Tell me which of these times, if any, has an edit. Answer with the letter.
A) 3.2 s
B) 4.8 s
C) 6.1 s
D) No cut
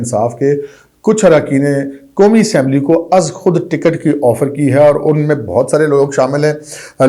D